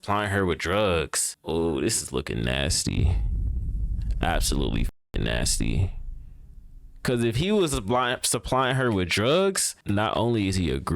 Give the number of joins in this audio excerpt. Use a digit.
2